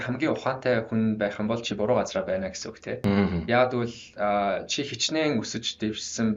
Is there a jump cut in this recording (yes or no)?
no